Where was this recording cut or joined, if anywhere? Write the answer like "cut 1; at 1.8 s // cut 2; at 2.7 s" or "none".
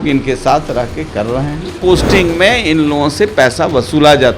cut 1; at 1.7 s